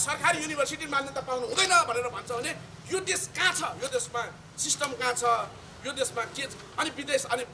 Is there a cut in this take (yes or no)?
no